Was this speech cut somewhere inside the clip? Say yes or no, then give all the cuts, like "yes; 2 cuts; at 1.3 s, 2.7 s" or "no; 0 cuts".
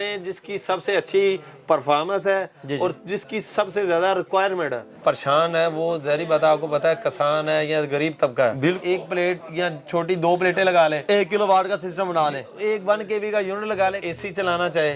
yes; 3 cuts; at 4.8 s, 8.8 s, 14.0 s